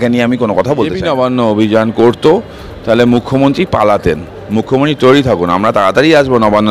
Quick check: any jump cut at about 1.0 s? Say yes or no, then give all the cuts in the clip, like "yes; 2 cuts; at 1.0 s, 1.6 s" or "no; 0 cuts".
yes; 1 cut; at 1.0 s